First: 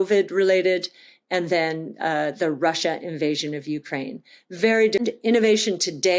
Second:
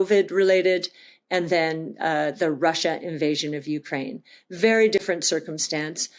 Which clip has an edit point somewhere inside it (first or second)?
first